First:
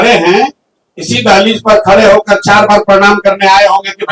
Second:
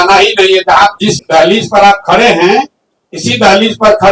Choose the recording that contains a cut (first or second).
second